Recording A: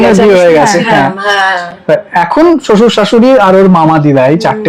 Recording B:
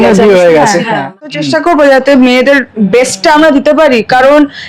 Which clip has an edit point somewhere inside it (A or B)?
B